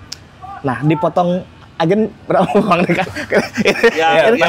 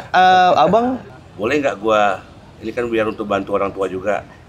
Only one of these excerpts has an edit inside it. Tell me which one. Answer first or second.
second